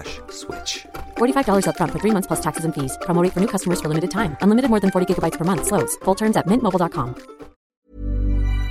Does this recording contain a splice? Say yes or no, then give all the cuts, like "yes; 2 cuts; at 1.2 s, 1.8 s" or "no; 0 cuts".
yes; 1 cut; at 7.6 s